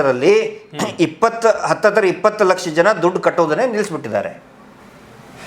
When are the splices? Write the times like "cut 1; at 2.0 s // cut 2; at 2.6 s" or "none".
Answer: none